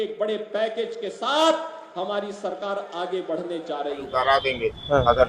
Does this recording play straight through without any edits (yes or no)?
no